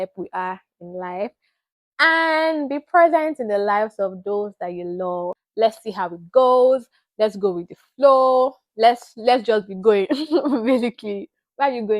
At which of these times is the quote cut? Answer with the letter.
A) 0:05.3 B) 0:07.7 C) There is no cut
A